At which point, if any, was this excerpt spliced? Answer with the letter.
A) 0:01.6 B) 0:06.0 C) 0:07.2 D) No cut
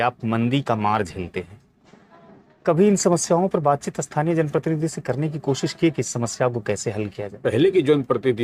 C